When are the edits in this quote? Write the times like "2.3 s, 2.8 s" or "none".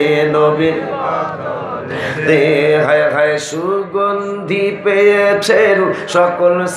none